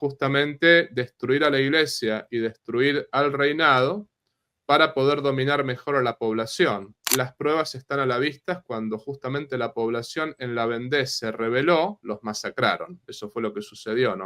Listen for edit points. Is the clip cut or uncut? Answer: cut